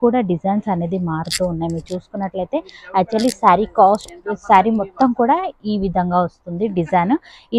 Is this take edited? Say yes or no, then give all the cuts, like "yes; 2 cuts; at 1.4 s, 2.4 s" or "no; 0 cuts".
no; 0 cuts